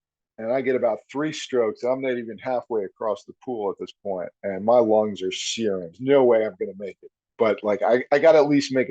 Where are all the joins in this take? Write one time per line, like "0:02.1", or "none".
0:05.9

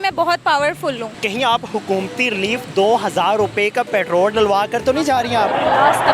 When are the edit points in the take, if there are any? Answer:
0:01.1

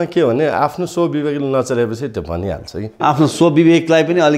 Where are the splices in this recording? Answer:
0:03.0

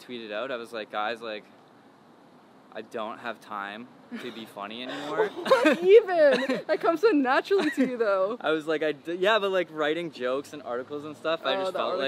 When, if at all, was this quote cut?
none

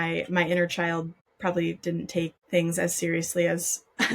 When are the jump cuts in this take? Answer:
0:01.2
0:02.4

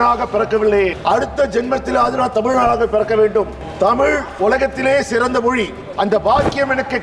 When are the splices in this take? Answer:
0:01.0
0:03.6
0:05.8

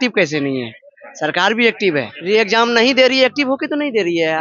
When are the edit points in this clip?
0:02.1

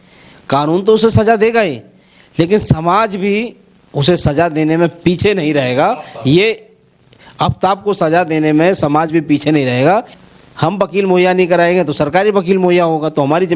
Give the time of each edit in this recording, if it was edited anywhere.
0:10.2

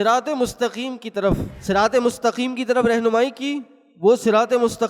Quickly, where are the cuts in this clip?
0:01.5

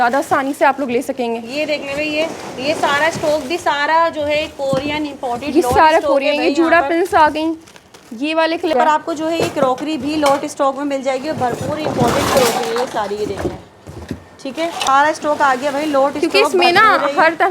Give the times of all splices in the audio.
0:08.7
0:14.9

